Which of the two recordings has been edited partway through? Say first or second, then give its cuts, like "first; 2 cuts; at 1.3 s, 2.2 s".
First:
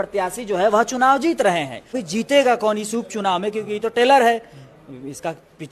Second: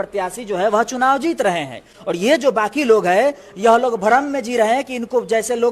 first; 1 cut; at 2.0 s